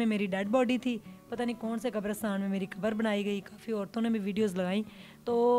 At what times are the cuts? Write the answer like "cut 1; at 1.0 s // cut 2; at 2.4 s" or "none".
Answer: none